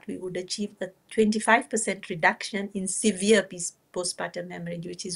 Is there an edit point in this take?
no; 0 cuts

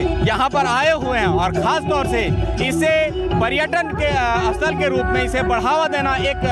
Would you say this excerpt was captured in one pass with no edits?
yes; 0 cuts

